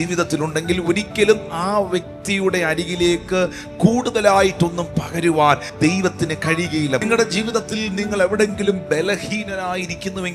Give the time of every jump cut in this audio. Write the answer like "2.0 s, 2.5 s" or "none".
5.7 s, 7.0 s